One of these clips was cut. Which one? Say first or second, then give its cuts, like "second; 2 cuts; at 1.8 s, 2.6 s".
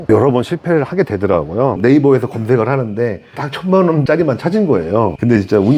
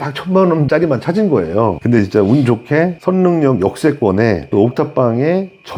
first; 1 cut; at 1.8 s